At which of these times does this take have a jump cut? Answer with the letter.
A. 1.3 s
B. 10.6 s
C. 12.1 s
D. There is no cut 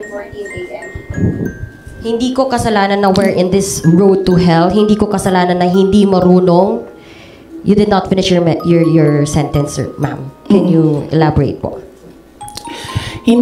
D